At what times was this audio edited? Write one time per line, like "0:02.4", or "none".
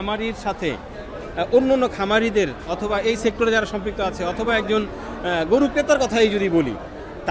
none